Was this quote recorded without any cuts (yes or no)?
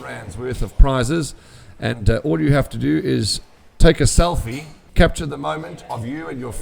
no